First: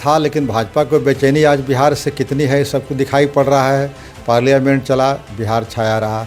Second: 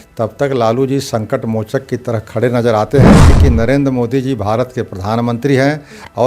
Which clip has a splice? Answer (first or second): second